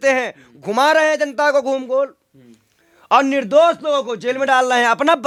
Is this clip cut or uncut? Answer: uncut